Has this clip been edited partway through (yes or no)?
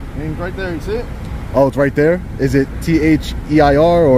no